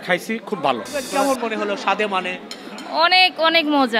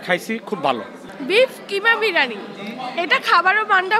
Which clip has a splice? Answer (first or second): first